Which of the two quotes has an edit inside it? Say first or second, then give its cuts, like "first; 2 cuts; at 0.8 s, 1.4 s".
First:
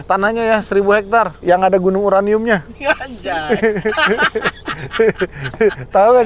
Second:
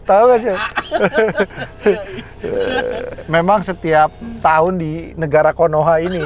first; 1 cut; at 1.3 s